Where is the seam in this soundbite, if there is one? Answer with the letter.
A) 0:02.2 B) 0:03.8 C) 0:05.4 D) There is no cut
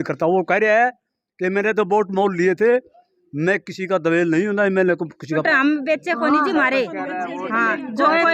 C